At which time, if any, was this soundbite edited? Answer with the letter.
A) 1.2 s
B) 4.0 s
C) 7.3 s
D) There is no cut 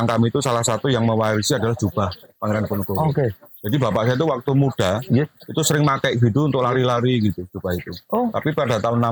D